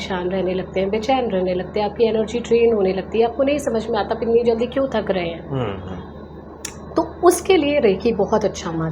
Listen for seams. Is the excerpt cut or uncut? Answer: uncut